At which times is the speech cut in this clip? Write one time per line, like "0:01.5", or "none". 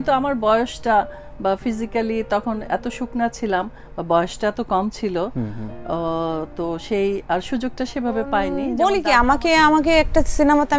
0:08.7